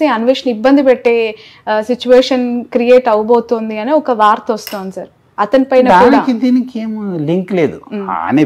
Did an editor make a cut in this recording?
no; 0 cuts

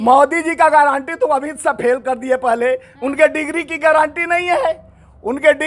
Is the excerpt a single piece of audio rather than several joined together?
yes; 0 cuts

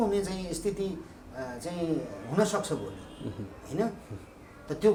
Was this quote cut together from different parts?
no; 0 cuts

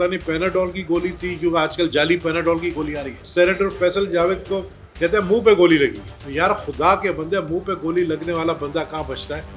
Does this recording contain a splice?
no; 0 cuts

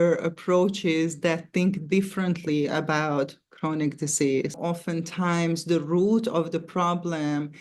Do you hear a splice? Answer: yes; 1 cut; at 4.6 s

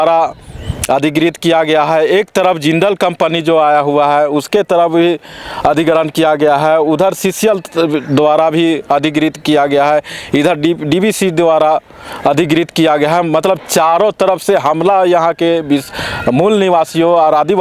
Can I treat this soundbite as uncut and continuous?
yes; 0 cuts

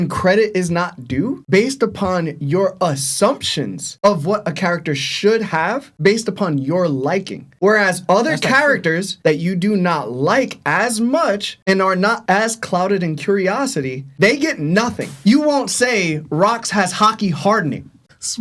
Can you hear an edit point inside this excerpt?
yes; 1 cut; at 15.2 s

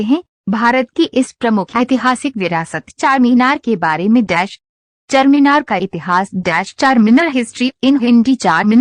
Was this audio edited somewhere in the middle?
no; 0 cuts

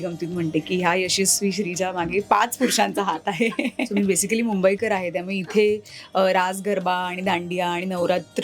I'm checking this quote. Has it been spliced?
yes; 1 cut; at 3.9 s

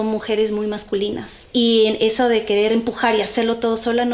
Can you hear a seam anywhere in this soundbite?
yes; 1 cut; at 1.3 s

